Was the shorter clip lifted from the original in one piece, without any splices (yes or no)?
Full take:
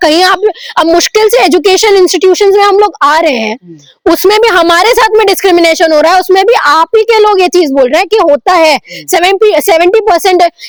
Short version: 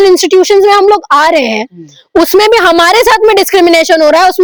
yes